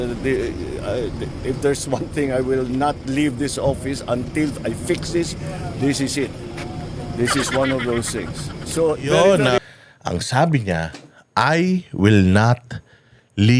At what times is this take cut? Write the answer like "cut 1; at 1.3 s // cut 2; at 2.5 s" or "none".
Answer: cut 1; at 9.6 s